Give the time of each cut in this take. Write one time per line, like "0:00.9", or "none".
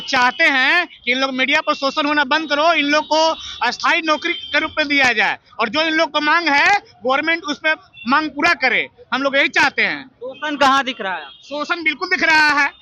none